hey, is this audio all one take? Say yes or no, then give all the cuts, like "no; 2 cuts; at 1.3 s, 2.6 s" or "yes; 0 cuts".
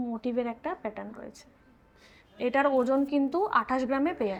yes; 0 cuts